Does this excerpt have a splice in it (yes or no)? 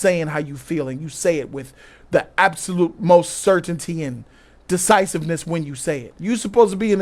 yes